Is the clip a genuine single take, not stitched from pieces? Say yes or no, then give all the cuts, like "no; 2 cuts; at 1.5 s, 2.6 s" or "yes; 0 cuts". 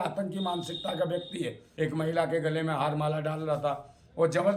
no; 1 cut; at 1.6 s